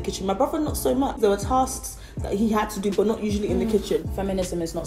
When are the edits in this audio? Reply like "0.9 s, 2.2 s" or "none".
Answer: 1.2 s, 4.0 s

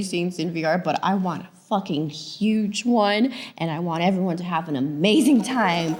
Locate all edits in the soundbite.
none

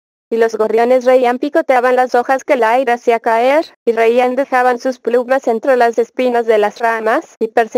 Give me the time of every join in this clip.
1.0 s, 4.0 s

